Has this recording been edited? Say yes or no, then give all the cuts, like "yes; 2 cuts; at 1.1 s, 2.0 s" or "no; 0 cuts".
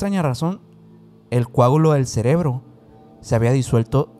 no; 0 cuts